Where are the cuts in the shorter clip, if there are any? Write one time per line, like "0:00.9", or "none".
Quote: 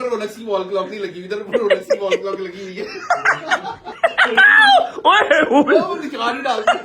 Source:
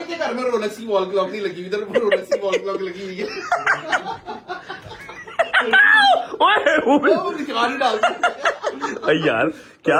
0:03.9